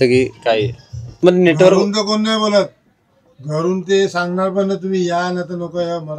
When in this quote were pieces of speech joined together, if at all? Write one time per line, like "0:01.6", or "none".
0:01.2